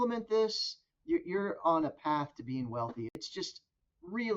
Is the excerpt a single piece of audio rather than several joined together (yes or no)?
no